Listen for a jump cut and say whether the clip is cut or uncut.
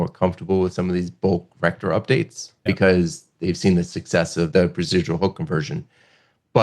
cut